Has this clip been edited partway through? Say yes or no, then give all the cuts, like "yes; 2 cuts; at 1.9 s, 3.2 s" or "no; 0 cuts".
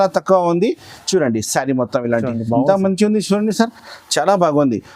no; 0 cuts